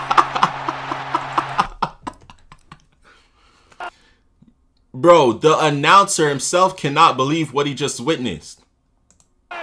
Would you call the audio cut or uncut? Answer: cut